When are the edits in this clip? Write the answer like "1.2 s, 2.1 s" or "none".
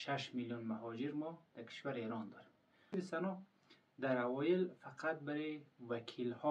2.9 s